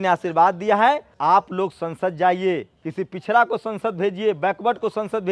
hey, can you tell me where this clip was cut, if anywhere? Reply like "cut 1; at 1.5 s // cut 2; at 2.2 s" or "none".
cut 1; at 1.1 s // cut 2; at 2.8 s